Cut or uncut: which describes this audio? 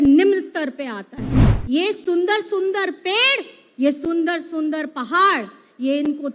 cut